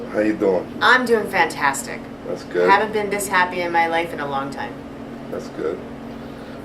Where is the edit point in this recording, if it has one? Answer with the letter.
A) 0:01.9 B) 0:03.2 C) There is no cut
A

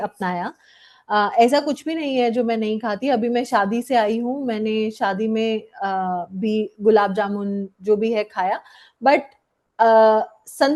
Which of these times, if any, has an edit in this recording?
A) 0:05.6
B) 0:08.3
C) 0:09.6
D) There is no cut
D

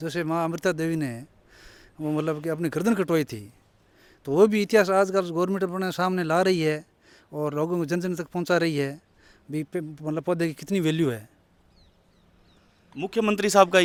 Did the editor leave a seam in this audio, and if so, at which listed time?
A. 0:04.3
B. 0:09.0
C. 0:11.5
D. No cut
D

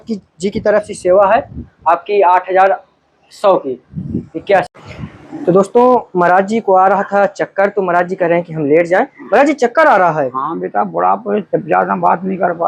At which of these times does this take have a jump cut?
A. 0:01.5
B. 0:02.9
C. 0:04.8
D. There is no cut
C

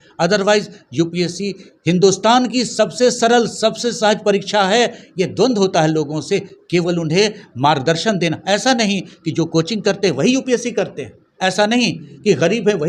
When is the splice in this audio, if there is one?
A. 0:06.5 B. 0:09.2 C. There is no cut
C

